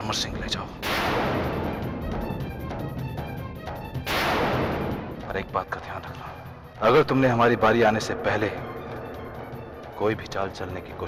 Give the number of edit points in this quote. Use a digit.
0